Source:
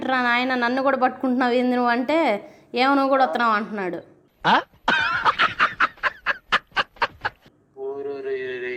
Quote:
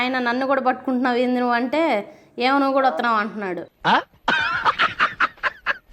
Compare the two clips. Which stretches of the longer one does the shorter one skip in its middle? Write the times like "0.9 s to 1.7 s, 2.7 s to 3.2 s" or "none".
4.1 s to 4.3 s